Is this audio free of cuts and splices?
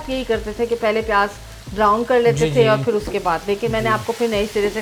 yes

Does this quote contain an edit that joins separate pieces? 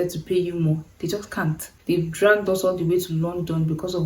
yes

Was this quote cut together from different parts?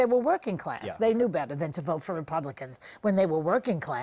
no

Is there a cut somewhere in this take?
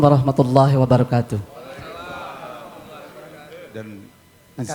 yes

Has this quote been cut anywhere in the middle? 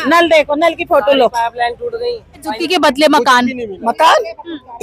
yes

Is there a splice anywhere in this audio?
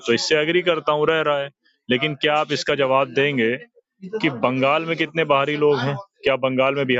no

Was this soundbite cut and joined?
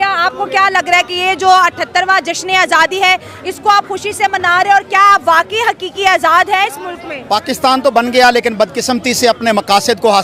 no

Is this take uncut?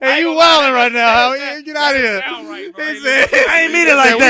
yes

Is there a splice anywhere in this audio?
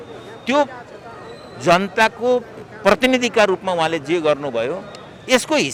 no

